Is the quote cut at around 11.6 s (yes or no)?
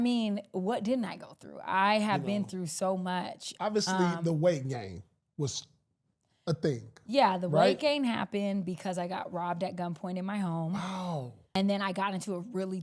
yes